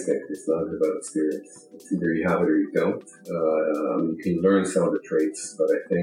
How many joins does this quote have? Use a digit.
0